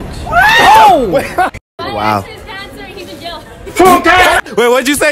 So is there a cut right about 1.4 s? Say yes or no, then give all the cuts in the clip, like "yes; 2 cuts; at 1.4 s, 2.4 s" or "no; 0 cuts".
yes; 1 cut; at 1.4 s